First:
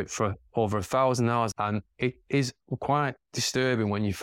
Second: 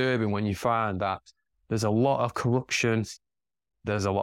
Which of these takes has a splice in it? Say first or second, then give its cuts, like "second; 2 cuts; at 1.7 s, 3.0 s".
first; 1 cut; at 1.5 s